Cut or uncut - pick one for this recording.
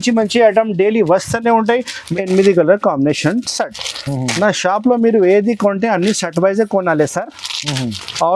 cut